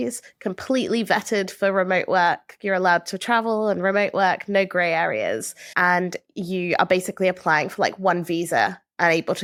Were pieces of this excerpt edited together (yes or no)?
no